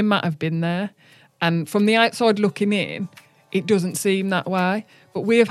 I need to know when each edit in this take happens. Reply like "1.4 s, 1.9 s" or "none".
none